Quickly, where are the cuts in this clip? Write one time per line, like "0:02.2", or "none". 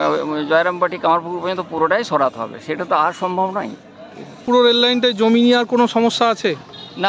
none